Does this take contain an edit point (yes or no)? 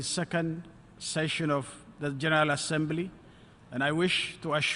yes